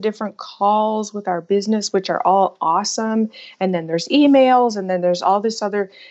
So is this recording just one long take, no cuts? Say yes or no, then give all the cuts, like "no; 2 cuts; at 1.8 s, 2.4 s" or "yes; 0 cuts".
yes; 0 cuts